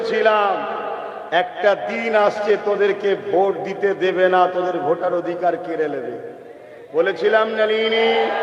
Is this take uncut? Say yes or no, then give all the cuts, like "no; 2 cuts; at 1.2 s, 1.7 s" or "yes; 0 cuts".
yes; 0 cuts